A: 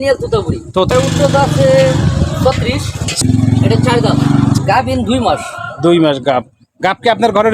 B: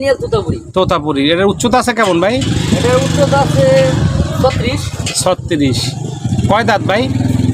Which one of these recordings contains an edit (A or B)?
A